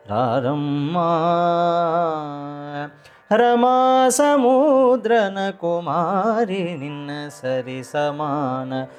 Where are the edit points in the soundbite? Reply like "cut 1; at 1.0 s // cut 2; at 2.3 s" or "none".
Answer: none